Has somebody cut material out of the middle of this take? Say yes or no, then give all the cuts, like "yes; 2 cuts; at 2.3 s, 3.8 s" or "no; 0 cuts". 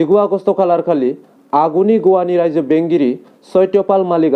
no; 0 cuts